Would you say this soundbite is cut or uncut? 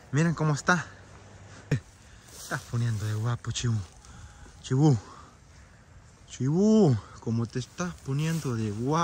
cut